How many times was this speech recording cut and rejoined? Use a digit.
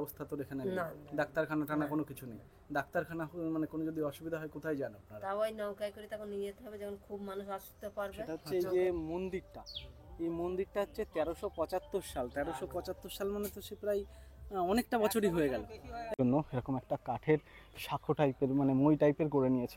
2